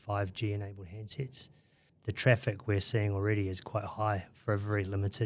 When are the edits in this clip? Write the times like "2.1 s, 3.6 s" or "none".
1.9 s